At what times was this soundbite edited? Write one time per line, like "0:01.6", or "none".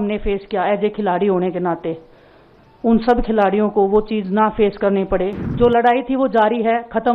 0:05.4

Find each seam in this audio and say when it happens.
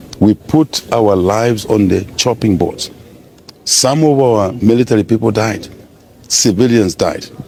none

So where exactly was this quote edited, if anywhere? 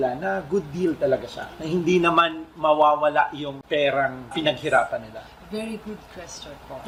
none

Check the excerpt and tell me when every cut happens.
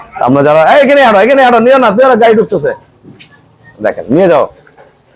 none

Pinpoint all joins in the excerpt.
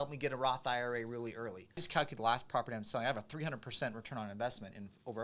0:01.9

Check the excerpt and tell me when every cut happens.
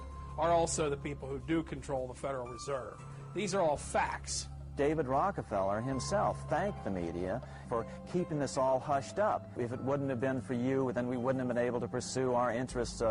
0:04.5

